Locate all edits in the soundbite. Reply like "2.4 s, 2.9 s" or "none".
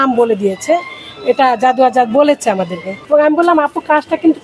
2.9 s

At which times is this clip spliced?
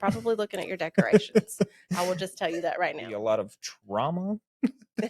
3.1 s

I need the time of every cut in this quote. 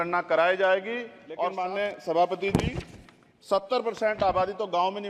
1.5 s

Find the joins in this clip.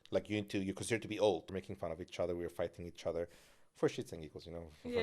1.6 s

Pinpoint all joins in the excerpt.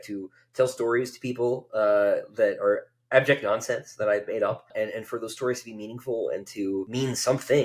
4.7 s, 6.9 s

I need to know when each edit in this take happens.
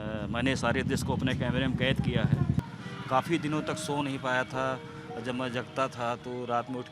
2.6 s

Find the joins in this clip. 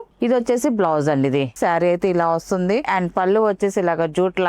1.5 s, 2.9 s

